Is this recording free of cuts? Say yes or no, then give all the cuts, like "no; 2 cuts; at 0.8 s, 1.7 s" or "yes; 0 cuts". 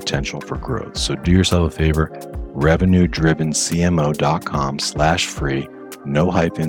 yes; 0 cuts